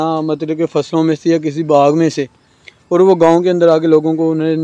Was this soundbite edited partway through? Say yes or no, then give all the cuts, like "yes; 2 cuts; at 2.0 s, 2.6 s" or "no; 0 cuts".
no; 0 cuts